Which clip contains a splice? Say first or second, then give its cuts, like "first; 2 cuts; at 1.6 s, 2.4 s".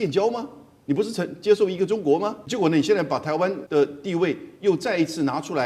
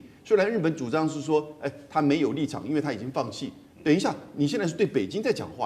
first; 2 cuts; at 2.4 s, 3.6 s